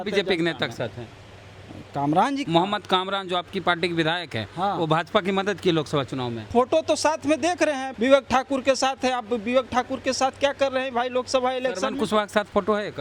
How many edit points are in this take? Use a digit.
3